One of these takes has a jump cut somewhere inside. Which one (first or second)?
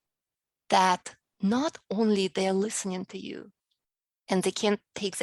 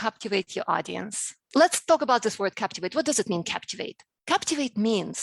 second